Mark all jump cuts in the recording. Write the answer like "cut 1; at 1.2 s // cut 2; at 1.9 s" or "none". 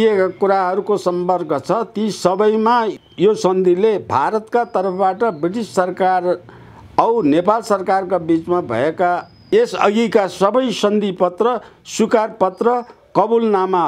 cut 1; at 2.9 s // cut 2; at 9.5 s